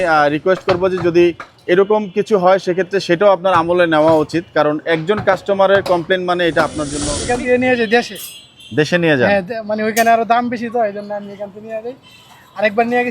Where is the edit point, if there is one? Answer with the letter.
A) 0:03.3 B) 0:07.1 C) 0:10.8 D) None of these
B